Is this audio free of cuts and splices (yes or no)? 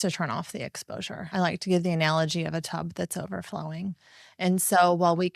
no